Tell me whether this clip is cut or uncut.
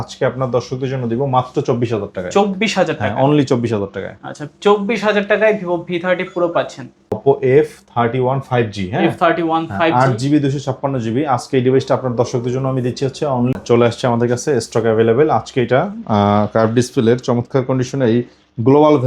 cut